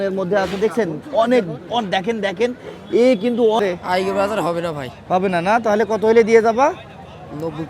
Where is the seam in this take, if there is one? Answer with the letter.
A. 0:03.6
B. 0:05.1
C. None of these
A